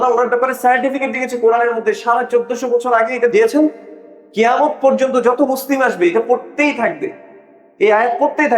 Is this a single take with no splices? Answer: no; 1 cut; at 3.3 s

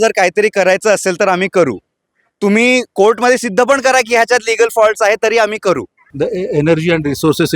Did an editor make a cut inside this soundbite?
yes; 1 cut; at 6.1 s

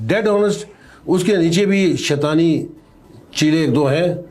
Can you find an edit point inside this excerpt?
no; 0 cuts

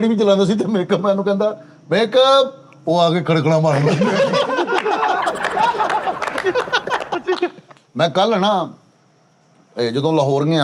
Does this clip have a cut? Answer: no; 0 cuts

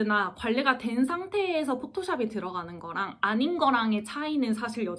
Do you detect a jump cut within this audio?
no; 0 cuts

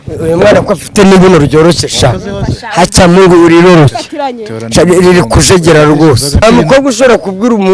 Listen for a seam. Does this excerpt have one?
yes; 1 cut; at 6.4 s

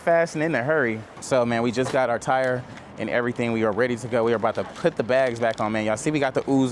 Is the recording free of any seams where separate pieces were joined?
no; 1 cut; at 1.1 s

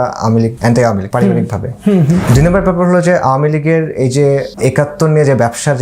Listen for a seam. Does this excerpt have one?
yes; 3 cuts; at 0.8 s, 2.2 s, 4.5 s

